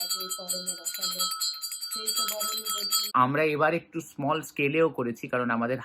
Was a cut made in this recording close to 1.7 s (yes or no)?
no